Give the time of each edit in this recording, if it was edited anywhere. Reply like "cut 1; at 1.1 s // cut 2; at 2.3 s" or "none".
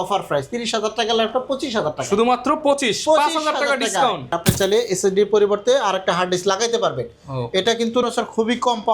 cut 1; at 4.4 s // cut 2; at 8.0 s